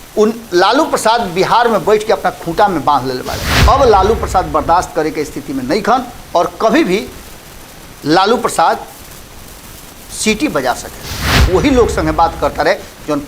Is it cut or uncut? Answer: cut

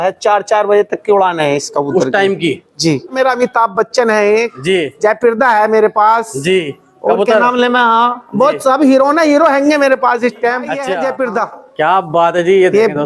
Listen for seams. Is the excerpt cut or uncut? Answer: cut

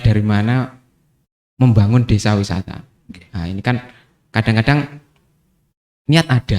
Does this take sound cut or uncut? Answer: uncut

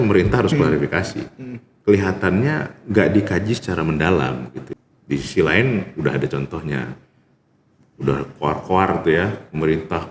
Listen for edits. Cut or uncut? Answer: cut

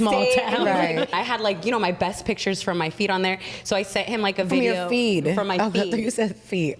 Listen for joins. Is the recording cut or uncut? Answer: cut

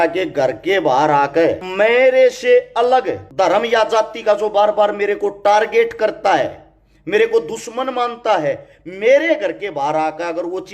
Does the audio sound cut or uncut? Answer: cut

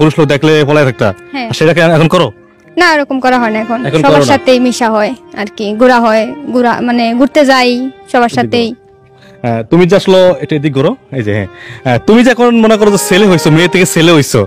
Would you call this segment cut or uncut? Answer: uncut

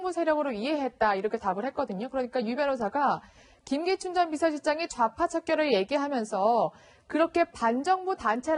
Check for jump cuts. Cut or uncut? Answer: uncut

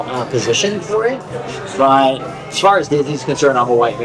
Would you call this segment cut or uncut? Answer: cut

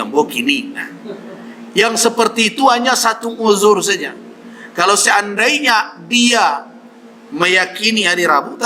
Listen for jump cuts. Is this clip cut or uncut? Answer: uncut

